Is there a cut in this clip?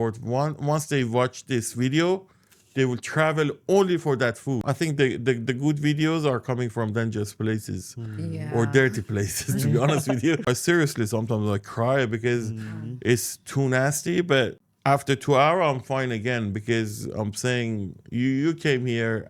yes; 3 cuts; at 4.6 s, 10.4 s, 14.7 s

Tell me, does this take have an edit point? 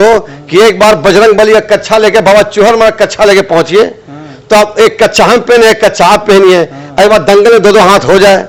no; 0 cuts

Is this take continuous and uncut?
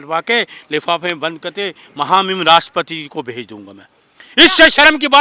yes; 0 cuts

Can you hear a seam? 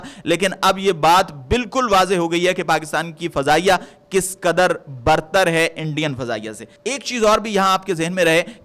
no; 0 cuts

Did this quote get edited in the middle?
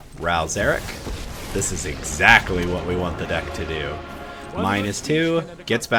no; 0 cuts

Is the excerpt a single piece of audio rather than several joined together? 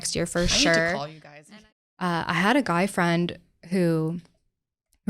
no; 1 cut; at 1.5 s

